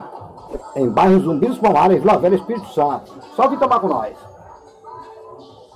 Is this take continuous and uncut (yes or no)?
yes